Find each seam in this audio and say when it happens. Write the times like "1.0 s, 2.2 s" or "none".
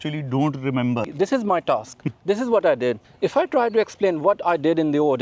1.1 s, 3.1 s